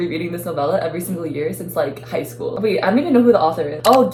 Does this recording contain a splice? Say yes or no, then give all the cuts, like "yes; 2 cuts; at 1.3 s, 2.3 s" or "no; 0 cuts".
no; 0 cuts